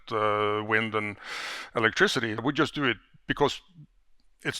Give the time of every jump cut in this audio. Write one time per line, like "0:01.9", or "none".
0:02.4